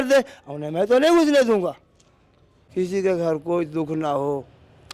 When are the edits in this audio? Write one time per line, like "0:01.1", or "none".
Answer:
0:02.5